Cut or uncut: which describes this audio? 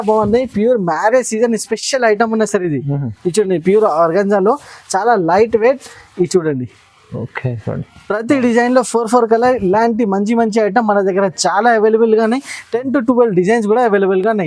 uncut